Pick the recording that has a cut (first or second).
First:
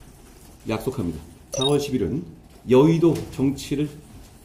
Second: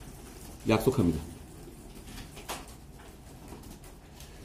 first